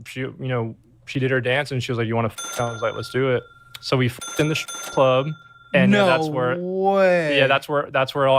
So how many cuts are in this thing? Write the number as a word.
two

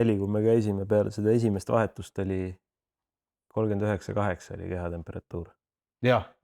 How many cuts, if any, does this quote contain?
zero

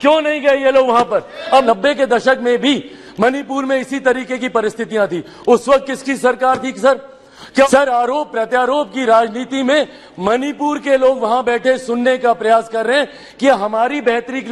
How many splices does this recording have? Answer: two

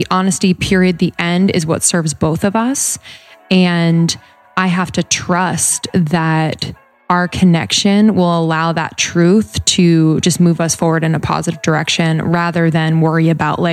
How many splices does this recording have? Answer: zero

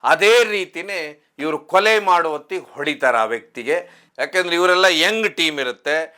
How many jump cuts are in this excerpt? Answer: one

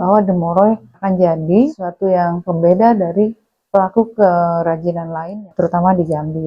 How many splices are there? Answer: three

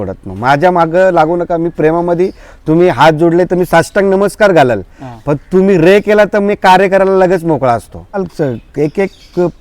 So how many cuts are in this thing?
one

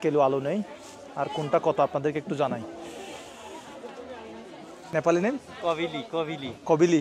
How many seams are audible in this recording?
one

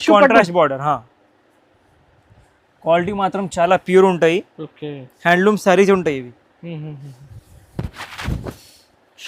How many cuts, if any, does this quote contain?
zero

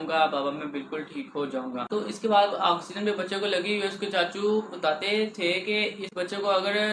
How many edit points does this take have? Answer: zero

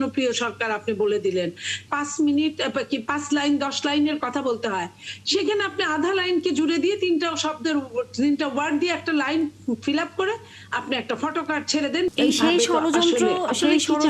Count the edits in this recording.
two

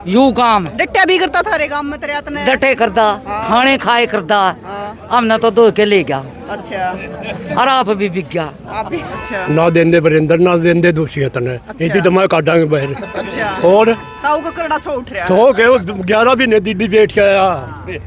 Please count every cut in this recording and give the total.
one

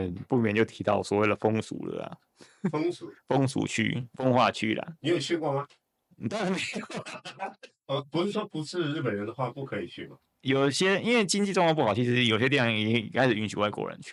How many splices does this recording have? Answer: zero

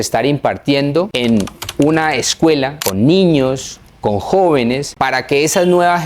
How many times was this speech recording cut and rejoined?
three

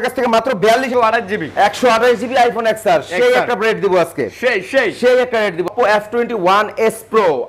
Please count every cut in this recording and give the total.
two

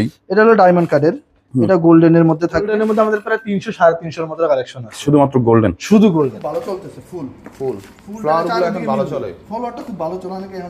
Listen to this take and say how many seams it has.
two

